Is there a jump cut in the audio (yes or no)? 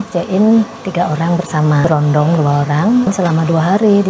yes